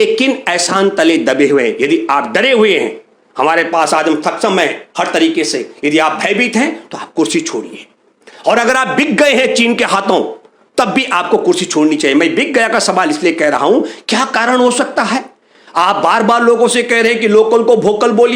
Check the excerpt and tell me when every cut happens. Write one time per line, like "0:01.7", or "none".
none

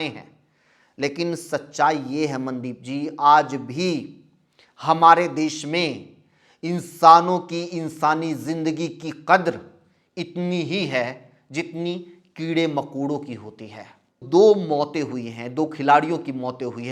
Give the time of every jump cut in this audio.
0:14.2

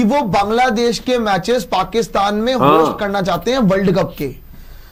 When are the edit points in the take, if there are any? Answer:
none

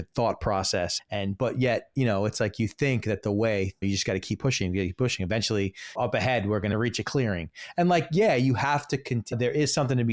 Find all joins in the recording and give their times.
0:01.0
0:03.8
0:05.9
0:06.7
0:09.3

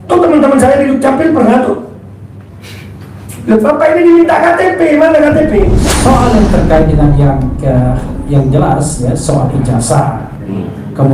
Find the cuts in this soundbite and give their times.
0:05.9

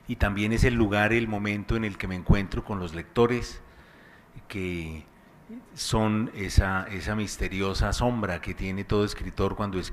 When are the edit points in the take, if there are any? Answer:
0:01.0

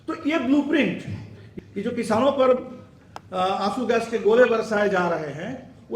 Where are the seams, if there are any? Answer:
0:01.4

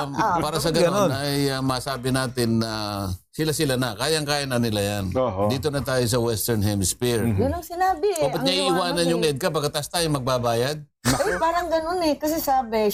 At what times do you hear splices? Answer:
none

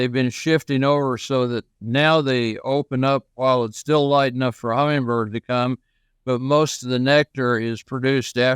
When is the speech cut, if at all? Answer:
none

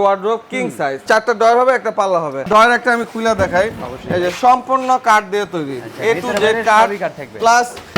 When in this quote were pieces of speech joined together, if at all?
0:01.0
0:02.4

